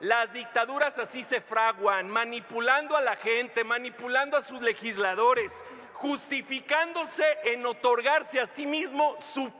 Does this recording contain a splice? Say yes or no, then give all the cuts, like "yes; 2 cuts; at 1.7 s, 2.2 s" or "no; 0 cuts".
no; 0 cuts